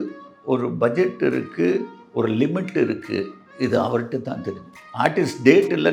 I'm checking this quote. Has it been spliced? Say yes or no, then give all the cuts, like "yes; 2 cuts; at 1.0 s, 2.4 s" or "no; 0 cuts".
no; 0 cuts